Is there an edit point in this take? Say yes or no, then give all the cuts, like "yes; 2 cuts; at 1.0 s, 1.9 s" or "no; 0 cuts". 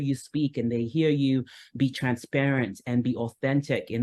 no; 0 cuts